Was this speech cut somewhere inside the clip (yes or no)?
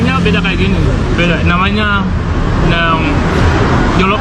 no